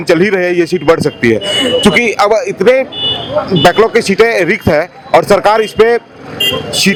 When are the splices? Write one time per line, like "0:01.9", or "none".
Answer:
none